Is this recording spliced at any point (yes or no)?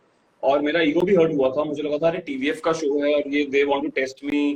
no